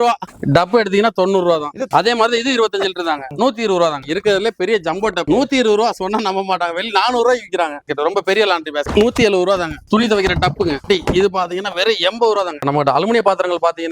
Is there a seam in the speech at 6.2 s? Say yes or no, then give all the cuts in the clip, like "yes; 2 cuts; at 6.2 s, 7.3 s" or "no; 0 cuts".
no; 5 cuts; at 1.9 s, 4.0 s, 7.9 s, 9.8 s, 12.6 s